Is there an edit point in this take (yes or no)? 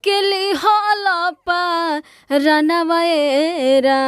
no